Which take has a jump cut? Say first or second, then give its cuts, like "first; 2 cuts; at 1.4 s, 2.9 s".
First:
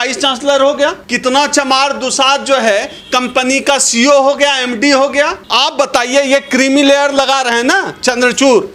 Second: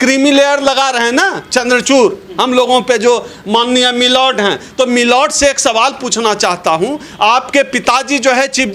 first; 2 cuts; at 1.1 s, 5.4 s